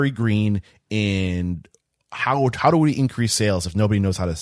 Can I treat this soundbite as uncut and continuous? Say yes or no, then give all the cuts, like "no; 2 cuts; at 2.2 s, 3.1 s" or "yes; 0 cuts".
yes; 0 cuts